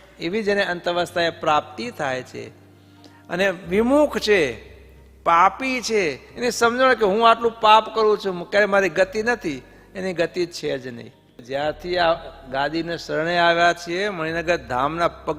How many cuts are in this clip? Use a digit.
1